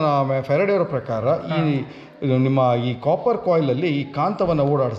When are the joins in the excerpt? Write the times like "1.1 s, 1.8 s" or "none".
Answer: none